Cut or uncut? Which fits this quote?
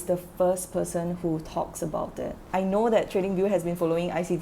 cut